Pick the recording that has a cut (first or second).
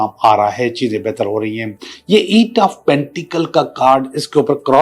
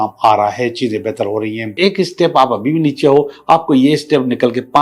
second